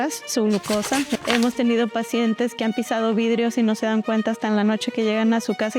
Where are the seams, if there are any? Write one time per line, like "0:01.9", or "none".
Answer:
0:01.1